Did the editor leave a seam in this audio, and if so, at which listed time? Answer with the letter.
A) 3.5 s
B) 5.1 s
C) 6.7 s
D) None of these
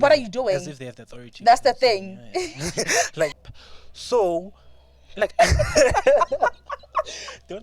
A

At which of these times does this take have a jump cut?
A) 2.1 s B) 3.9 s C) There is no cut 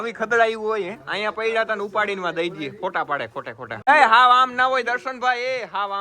B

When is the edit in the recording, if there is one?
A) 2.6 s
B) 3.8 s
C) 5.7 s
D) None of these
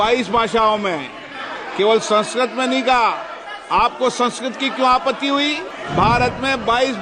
C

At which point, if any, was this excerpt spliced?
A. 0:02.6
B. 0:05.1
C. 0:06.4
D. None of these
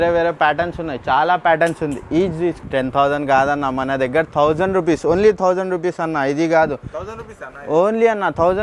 A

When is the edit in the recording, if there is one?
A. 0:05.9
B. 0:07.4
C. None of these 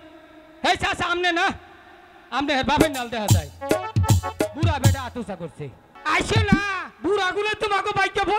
A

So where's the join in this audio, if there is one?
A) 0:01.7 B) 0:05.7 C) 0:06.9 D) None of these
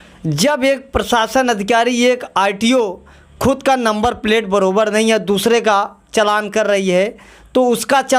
D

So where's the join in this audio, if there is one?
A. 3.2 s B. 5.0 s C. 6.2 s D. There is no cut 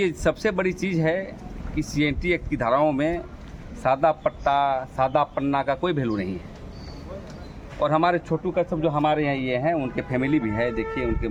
D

